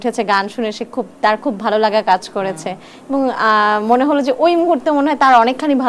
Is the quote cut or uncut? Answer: uncut